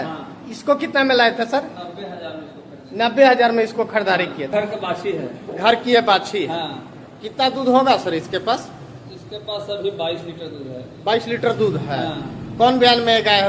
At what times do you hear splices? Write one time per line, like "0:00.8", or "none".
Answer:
none